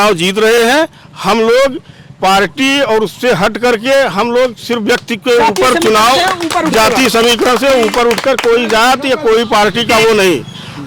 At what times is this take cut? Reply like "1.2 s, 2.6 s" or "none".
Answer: none